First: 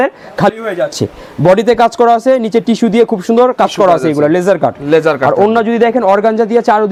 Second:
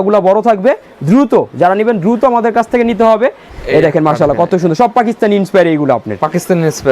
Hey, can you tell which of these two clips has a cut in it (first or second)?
second